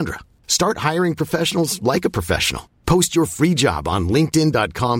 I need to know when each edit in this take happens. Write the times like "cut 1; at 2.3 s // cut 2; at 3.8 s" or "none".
none